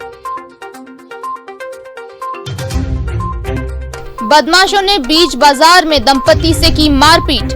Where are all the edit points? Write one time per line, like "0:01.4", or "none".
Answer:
0:03.0
0:04.2